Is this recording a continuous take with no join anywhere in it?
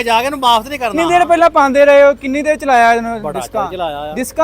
no; 1 cut; at 0.9 s

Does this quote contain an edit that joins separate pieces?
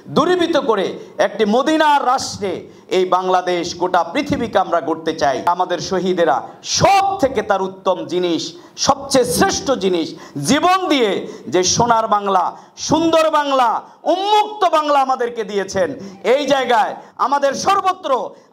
yes; 2 cuts; at 5.5 s, 17.0 s

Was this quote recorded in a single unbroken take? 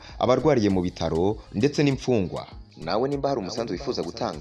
yes; 0 cuts

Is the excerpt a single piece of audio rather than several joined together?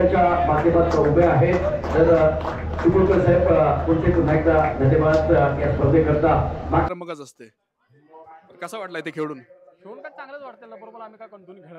no; 1 cut; at 6.9 s

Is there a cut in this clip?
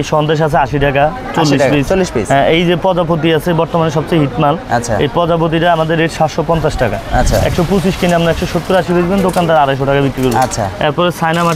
no; 0 cuts

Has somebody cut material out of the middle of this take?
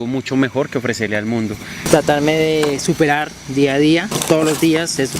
yes; 2 cuts; at 1.8 s, 4.1 s

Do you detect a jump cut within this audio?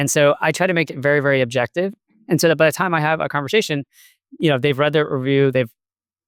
no; 0 cuts

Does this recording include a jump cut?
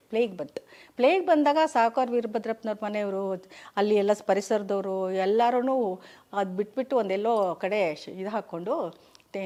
no; 0 cuts

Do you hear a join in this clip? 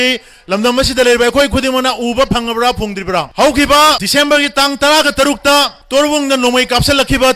yes; 3 cuts; at 3.3 s, 4.0 s, 5.8 s

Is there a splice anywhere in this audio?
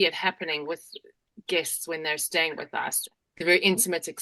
yes; 1 cut; at 3.0 s

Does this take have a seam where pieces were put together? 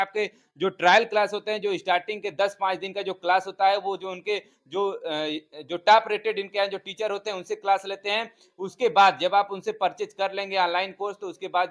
no; 0 cuts

